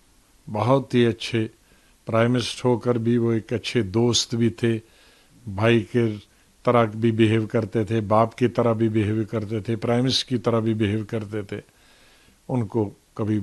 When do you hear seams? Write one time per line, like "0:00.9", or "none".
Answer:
none